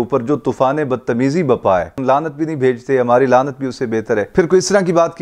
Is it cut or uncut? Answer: cut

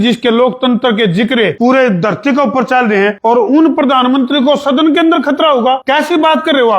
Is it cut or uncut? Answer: cut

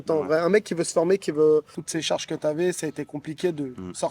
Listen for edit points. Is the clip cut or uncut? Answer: cut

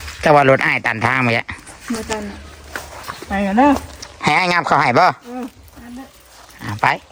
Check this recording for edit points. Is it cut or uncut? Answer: uncut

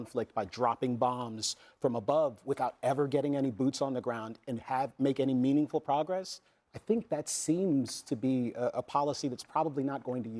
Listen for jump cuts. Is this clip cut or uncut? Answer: uncut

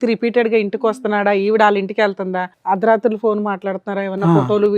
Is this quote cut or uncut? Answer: cut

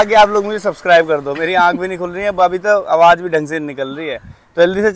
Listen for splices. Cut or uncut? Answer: uncut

